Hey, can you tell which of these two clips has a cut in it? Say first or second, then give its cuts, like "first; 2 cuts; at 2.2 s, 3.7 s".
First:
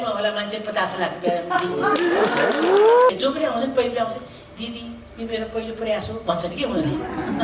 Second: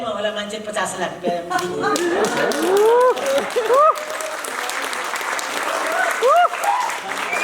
first; 1 cut; at 3.1 s